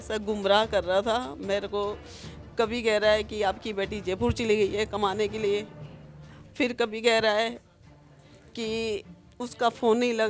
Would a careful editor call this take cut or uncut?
uncut